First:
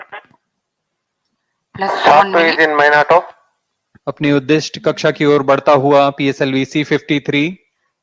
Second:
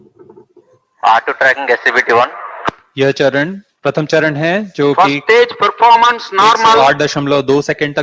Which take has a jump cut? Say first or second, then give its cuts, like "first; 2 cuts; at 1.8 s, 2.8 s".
second; 1 cut; at 3.6 s